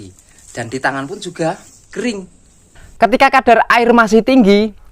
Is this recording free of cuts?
no; 1 cut; at 2.8 s

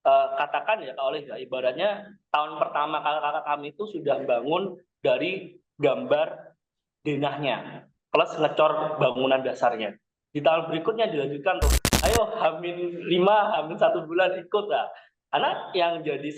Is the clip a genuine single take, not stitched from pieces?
no; 1 cut; at 11.8 s

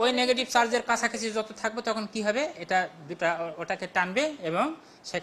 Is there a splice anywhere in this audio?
no; 0 cuts

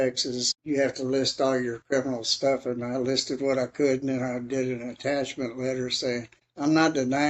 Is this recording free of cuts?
no; 1 cut; at 6.4 s

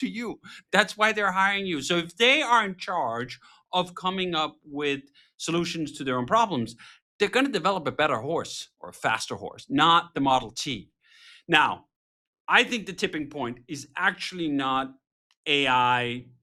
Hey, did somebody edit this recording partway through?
no; 0 cuts

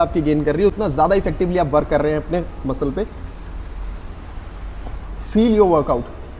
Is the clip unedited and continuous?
yes; 0 cuts

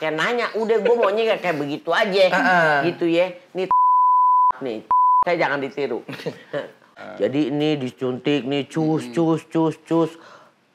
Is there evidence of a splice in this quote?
yes; 1 cut; at 7.0 s

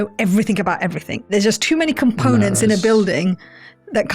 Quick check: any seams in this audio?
yes; 1 cut; at 1.3 s

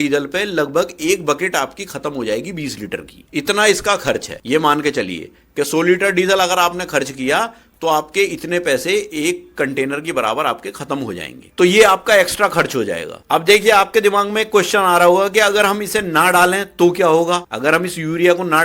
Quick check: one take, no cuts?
yes; 0 cuts

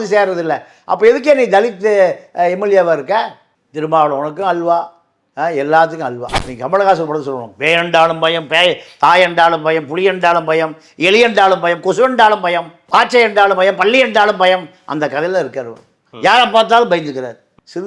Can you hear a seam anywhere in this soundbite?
yes; 1 cut; at 6.3 s

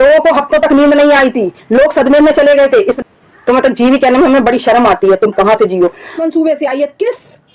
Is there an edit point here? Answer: yes; 2 cuts; at 2.9 s, 6.2 s

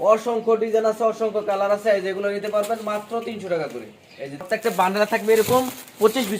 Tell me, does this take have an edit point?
yes; 1 cut; at 4.4 s

